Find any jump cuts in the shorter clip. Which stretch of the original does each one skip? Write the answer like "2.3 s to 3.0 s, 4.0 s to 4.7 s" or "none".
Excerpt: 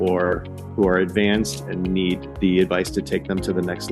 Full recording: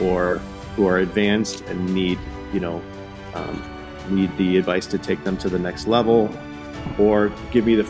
2.4 s to 4.3 s